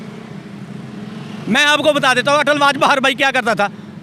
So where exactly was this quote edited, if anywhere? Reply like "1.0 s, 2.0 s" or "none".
none